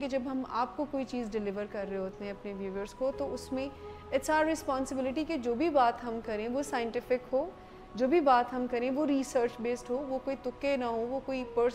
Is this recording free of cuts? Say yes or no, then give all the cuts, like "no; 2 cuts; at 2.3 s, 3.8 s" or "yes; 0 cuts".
yes; 0 cuts